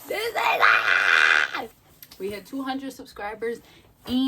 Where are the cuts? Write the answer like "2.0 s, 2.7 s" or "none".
1.8 s